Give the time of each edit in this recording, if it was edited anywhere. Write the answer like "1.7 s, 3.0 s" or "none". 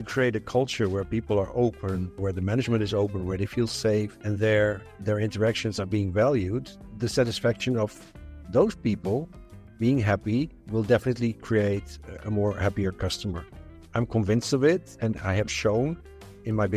none